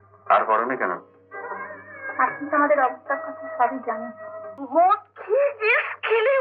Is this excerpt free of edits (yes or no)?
no